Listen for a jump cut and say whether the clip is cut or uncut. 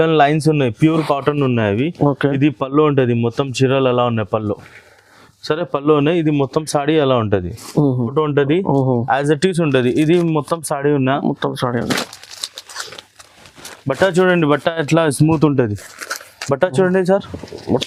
cut